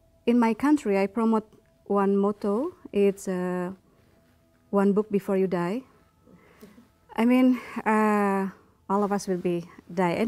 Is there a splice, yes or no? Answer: no